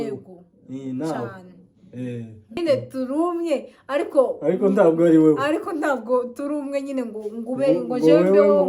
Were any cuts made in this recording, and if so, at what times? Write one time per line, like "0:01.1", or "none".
0:02.6